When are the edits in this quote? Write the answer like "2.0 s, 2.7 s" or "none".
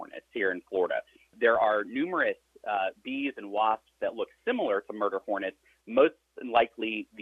1.3 s